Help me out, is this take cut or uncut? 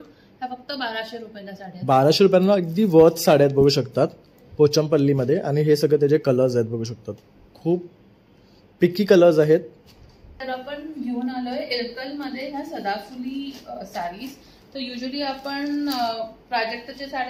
cut